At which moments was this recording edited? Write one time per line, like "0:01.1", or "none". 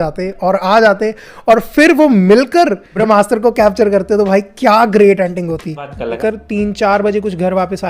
0:02.9
0:06.0